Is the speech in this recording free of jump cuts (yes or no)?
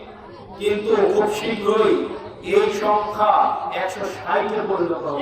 yes